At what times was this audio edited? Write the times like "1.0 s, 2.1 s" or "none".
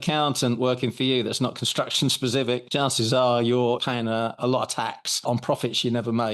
2.7 s, 3.8 s, 5.1 s